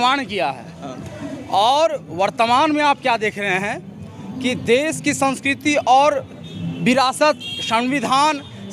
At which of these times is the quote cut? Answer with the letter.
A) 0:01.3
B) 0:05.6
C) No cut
C